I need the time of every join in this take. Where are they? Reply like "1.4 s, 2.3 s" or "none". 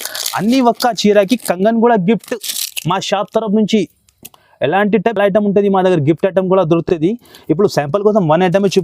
none

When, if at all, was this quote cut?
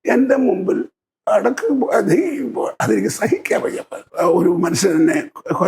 4.0 s

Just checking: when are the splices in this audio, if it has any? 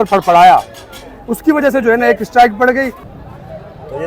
3.1 s

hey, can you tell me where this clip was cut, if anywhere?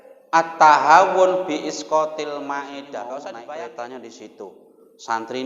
3.3 s

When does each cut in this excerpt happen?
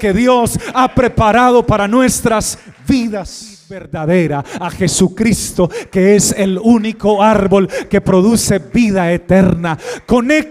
3.9 s

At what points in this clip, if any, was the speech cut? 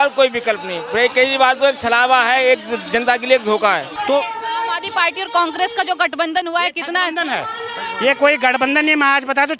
3.9 s

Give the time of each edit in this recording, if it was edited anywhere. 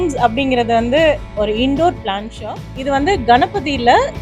2.4 s

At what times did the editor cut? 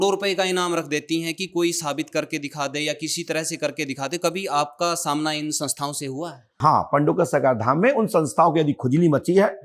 6.6 s

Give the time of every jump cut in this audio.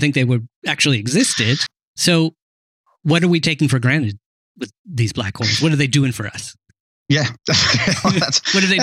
1.7 s

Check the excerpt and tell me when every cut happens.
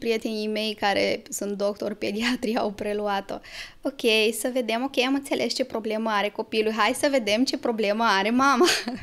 none

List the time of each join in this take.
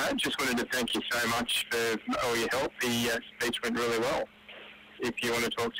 none

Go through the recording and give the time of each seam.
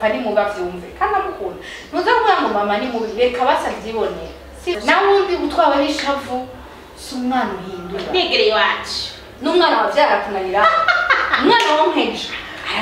4.8 s

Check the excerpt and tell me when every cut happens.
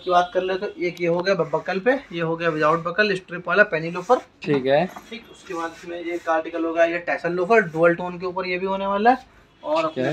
none

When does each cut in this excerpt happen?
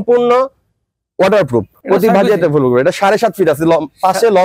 1.7 s

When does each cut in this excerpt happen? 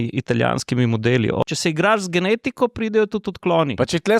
1.4 s

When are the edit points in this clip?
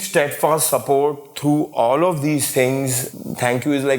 3.0 s

